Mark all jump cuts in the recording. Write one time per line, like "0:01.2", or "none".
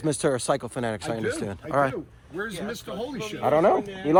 none